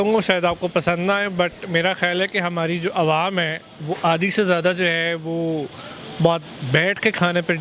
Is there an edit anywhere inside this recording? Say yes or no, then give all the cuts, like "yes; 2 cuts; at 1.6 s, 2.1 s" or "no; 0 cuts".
no; 0 cuts